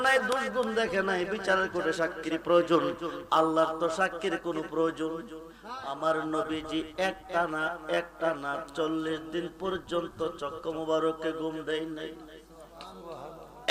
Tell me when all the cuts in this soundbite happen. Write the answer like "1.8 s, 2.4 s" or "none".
5.9 s